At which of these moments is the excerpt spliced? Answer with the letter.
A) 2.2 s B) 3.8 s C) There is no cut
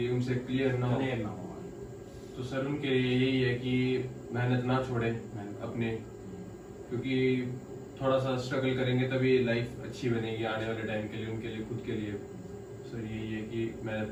C